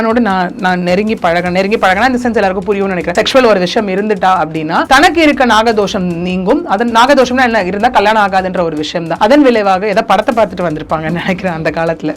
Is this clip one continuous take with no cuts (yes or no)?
no